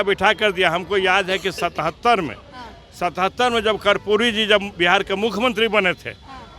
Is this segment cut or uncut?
uncut